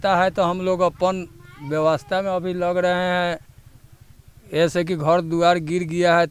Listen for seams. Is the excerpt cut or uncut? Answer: uncut